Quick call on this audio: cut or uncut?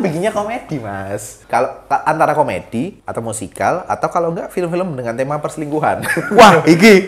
cut